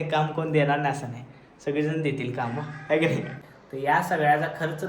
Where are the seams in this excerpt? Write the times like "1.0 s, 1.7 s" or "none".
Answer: 3.4 s